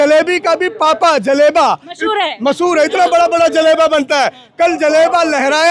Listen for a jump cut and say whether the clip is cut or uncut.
uncut